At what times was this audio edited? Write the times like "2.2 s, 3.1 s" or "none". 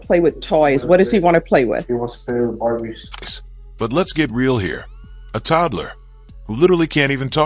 none